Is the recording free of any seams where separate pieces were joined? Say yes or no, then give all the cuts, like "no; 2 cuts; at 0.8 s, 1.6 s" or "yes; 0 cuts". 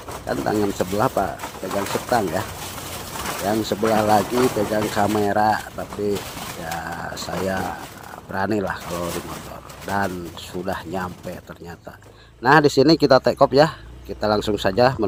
yes; 0 cuts